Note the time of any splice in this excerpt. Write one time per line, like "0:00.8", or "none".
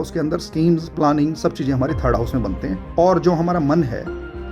0:02.8